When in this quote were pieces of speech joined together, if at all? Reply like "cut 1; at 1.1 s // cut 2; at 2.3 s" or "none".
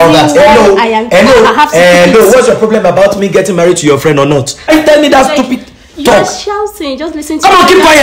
cut 1; at 4.7 s

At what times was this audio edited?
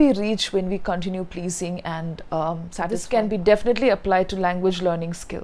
cut 1; at 3.0 s

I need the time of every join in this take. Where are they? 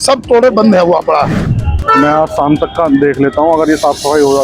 cut 1; at 1.4 s

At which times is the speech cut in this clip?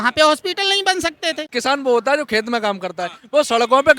cut 1; at 1.5 s

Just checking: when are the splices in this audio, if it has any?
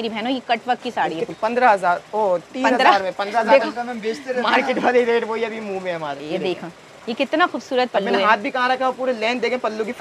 cut 1; at 1.3 s // cut 2; at 6.2 s

